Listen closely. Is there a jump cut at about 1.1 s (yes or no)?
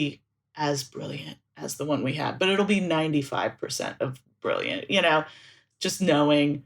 no